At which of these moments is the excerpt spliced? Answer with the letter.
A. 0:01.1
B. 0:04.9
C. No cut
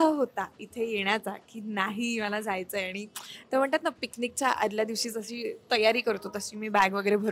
C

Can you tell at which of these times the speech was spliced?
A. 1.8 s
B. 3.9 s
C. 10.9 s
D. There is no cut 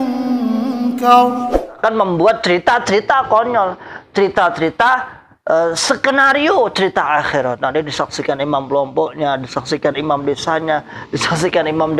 A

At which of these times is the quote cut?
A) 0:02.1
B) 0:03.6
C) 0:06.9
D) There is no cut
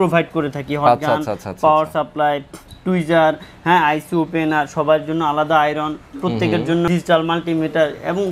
C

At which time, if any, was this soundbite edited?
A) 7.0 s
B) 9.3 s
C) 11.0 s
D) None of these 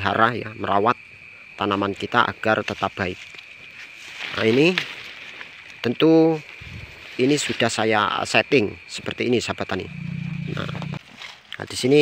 C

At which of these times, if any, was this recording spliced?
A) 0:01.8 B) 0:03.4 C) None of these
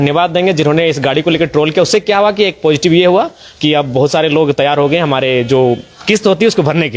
C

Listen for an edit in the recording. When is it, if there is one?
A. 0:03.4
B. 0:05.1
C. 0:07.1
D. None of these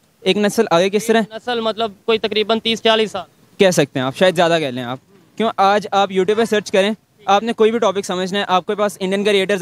D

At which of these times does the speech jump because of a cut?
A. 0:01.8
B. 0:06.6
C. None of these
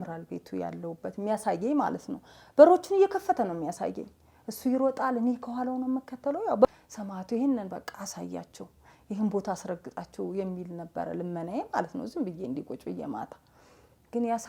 B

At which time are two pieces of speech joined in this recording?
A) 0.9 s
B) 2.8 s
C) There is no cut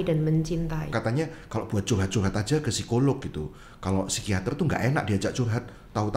A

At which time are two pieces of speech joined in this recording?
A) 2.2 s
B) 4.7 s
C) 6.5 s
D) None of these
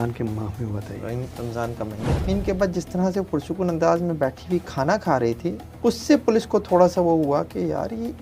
A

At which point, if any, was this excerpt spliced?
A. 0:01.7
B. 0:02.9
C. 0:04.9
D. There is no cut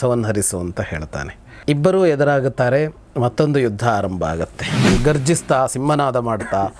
C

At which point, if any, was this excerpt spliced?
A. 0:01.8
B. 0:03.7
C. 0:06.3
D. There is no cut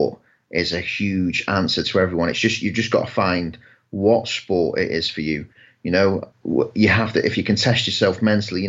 C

